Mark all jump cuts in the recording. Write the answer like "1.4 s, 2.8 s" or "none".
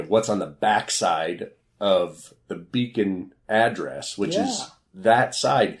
3.3 s